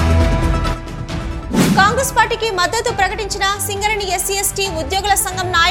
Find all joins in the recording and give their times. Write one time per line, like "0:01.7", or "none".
none